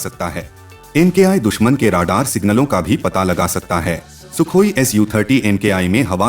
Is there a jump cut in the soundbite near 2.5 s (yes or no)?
no